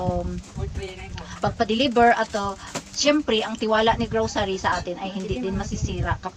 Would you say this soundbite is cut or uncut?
uncut